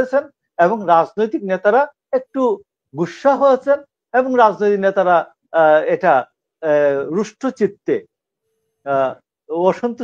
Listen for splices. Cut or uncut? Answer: uncut